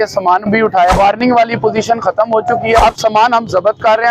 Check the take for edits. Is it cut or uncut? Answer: cut